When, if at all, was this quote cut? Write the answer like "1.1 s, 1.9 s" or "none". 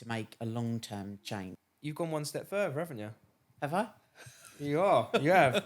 1.5 s